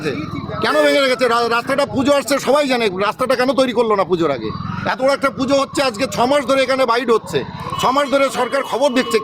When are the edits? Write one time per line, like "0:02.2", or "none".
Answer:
none

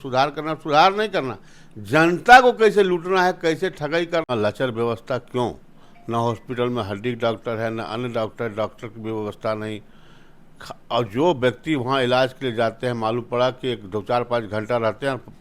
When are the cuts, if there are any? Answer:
0:04.3

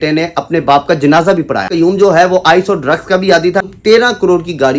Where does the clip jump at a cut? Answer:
0:01.7
0:03.6

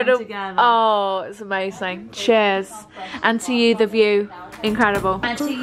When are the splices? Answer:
none

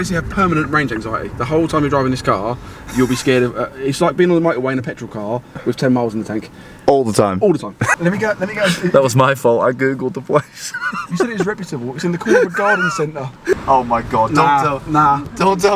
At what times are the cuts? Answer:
0:07.8
0:13.6

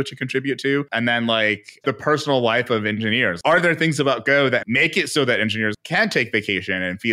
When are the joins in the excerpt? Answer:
0:00.9
0:01.8
0:03.3
0:04.6
0:05.8

